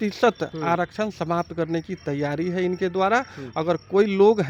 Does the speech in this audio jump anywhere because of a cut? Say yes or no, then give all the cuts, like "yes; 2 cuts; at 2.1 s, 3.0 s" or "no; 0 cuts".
no; 0 cuts